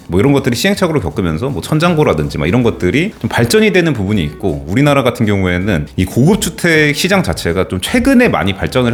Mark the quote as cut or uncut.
uncut